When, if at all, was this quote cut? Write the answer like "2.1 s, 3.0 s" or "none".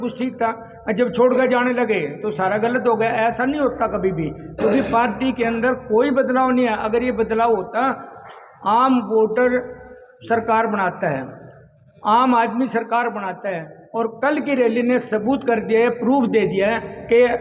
none

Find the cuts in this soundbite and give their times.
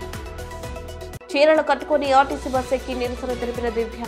none

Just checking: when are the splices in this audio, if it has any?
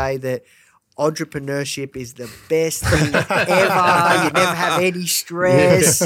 none

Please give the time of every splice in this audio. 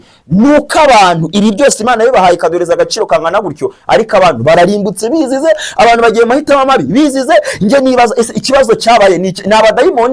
none

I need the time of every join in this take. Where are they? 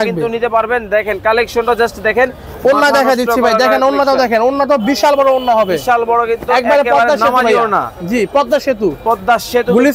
none

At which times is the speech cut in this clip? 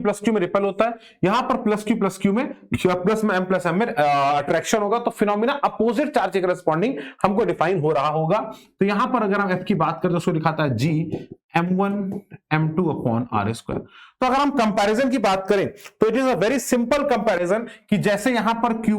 none

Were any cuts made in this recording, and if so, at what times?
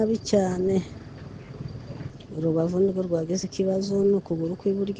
2.1 s

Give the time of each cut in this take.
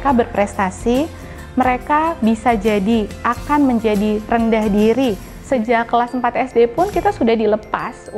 5.3 s

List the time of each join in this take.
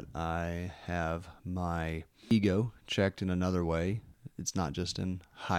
2.3 s, 4.1 s

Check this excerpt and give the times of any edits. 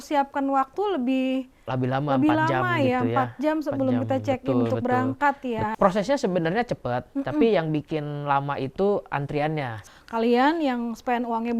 5.7 s, 9.8 s

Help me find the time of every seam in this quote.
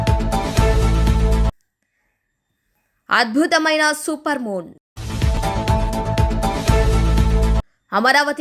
1.4 s

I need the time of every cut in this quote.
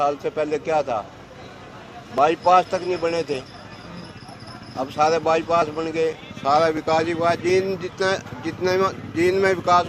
none

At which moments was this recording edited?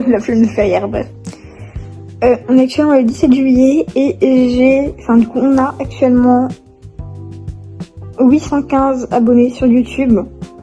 none

